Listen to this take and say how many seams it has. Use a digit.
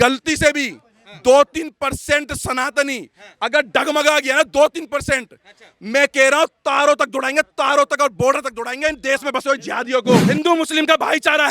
1